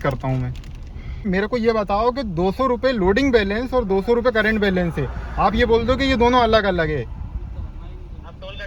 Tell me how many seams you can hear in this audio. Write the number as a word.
one